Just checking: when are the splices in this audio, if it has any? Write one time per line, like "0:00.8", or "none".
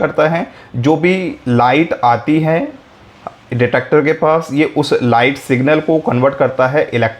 none